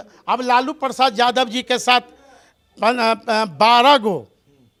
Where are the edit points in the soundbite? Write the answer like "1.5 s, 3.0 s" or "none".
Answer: none